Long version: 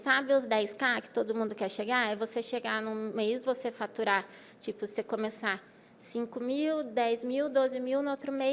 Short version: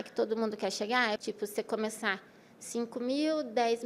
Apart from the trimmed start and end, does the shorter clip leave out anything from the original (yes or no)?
yes